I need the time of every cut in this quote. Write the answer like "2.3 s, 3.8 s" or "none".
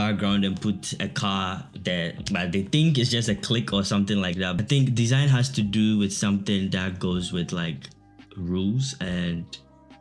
4.6 s